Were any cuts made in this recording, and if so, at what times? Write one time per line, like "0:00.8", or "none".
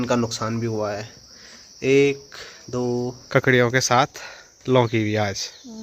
0:03.2